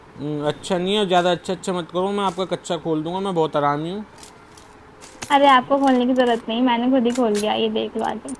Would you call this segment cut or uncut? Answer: uncut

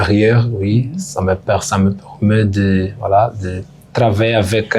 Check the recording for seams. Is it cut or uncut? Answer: uncut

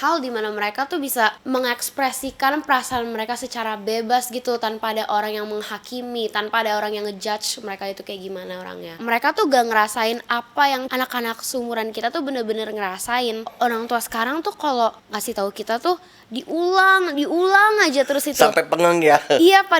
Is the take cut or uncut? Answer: cut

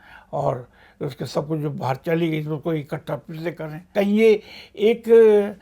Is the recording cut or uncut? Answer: cut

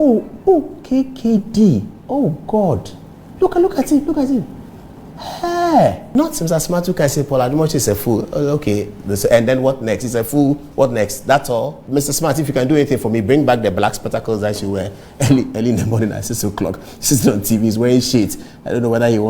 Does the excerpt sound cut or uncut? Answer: cut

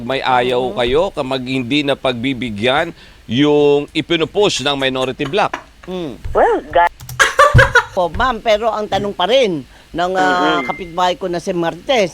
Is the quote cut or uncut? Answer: cut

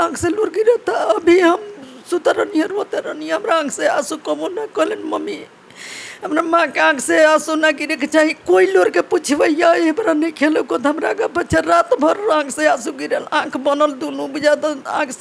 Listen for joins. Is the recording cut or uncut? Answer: uncut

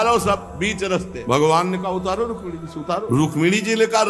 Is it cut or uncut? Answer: cut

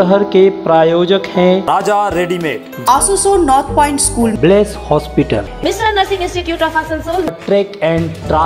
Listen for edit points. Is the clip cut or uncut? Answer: uncut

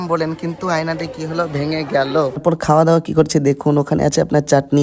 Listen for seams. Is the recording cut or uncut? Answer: cut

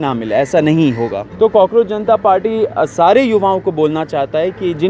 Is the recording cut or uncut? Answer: cut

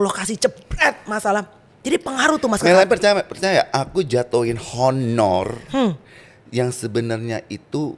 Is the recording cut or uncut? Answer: uncut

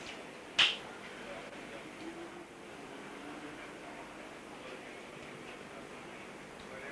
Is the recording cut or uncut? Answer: cut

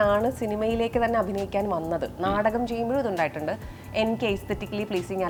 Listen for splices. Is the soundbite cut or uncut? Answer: uncut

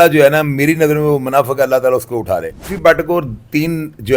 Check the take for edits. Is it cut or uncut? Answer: cut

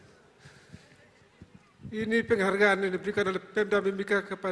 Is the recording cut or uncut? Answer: uncut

